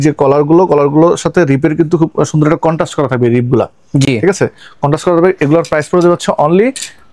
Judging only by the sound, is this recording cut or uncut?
uncut